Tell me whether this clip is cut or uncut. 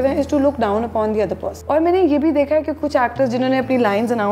cut